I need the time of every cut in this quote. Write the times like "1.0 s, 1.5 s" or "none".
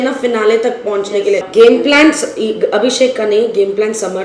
1.5 s